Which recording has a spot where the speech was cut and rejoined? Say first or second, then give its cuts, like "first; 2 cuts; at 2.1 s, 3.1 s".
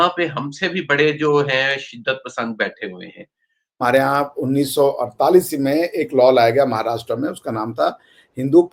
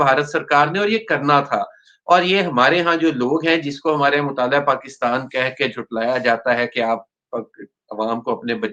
first; 1 cut; at 3.8 s